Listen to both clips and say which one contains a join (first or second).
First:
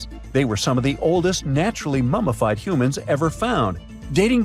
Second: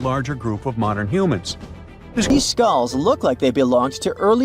second